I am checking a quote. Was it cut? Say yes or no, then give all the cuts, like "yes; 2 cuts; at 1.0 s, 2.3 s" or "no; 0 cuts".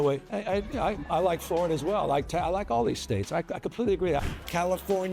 yes; 1 cut; at 4.2 s